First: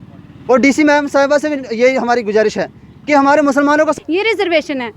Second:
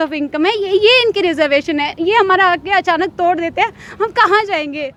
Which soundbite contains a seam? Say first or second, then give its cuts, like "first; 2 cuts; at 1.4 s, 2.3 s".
first; 1 cut; at 3.9 s